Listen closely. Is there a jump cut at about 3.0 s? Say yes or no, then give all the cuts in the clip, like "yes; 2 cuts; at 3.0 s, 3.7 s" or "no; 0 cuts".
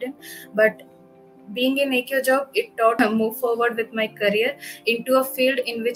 yes; 1 cut; at 3.0 s